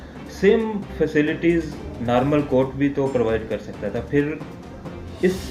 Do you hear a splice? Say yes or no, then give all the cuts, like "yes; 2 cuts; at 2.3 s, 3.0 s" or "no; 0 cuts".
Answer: no; 0 cuts